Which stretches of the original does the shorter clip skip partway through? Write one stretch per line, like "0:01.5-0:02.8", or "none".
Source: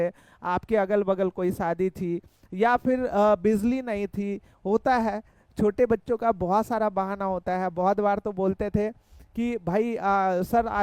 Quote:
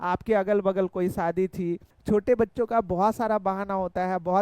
0:02.3-0:05.4